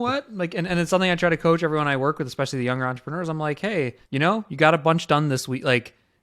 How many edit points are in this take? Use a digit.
1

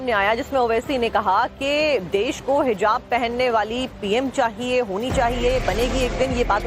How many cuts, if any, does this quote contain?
1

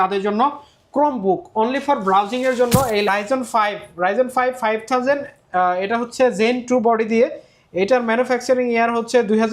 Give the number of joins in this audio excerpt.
1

